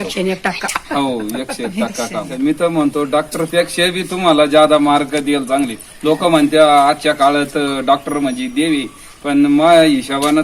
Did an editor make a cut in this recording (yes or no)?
yes